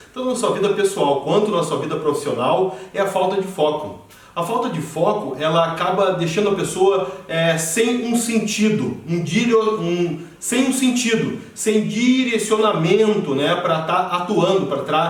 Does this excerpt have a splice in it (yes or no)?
no